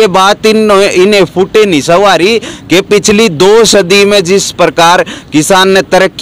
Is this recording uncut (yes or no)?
yes